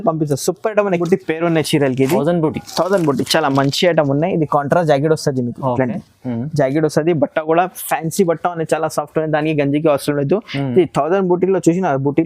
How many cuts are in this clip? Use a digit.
1